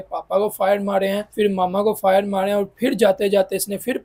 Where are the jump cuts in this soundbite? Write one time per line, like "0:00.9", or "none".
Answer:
0:01.3